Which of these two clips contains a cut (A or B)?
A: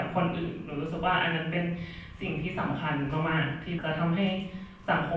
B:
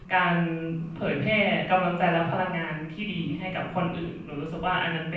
A